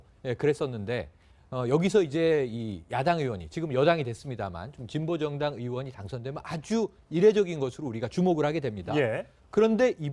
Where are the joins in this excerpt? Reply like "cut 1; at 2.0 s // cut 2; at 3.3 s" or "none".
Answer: none